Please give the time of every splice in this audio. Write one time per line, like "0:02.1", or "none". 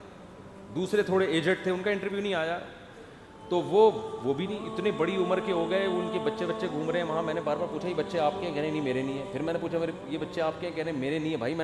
none